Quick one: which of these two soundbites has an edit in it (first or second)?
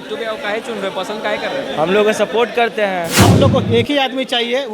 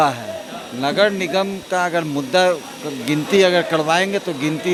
first